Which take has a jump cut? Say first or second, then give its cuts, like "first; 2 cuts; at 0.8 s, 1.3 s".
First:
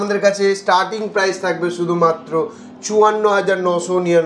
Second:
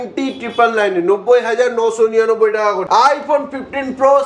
second; 1 cut; at 2.8 s